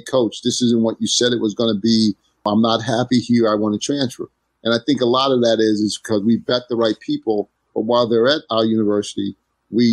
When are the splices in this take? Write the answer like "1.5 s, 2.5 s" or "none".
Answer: 2.4 s